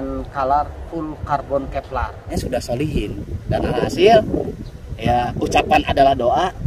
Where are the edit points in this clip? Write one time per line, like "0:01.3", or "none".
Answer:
0:02.3